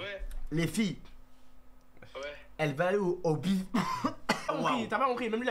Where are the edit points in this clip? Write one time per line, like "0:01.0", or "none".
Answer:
0:04.5